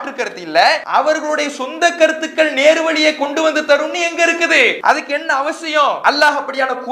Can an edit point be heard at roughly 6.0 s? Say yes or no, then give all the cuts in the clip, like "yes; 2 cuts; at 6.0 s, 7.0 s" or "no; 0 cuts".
yes; 3 cuts; at 0.8 s, 4.8 s, 6.0 s